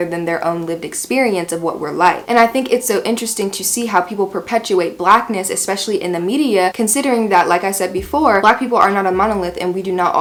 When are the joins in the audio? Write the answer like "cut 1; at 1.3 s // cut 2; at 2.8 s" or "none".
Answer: none